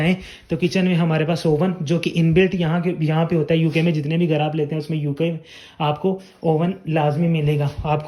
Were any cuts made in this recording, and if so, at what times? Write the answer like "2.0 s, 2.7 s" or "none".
none